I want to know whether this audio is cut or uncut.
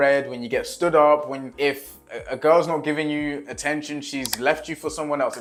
uncut